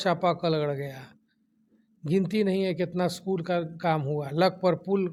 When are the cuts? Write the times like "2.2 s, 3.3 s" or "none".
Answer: none